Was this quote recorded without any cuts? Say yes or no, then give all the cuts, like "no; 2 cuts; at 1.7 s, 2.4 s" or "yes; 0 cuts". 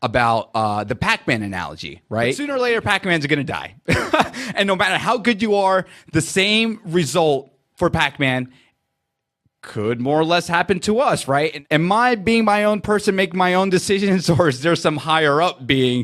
no; 2 cuts; at 2.4 s, 11.5 s